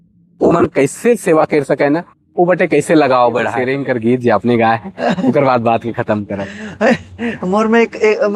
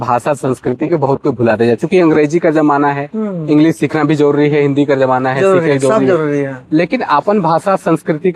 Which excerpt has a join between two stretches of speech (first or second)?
first